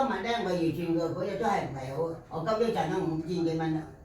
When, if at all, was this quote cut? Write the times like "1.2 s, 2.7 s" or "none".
none